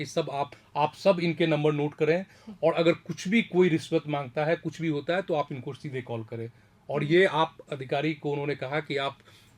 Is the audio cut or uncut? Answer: uncut